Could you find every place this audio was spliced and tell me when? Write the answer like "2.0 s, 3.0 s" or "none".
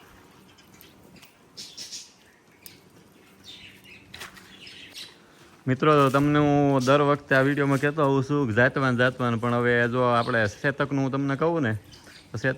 4.9 s